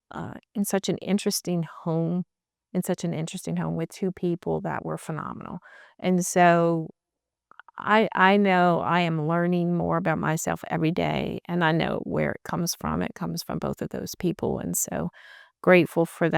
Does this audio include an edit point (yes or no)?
no